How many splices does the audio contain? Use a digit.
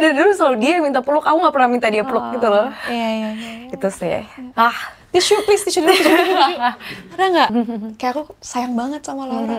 1